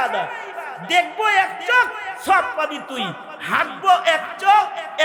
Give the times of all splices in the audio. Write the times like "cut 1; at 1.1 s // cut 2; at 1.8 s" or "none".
none